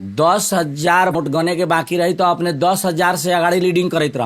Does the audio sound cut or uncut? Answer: cut